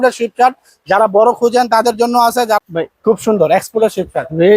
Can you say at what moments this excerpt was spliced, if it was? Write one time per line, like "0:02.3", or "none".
0:02.6